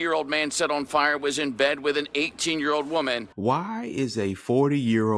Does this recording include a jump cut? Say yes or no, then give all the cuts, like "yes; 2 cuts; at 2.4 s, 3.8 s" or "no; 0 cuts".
yes; 1 cut; at 3.3 s